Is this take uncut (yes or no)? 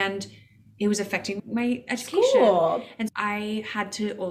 no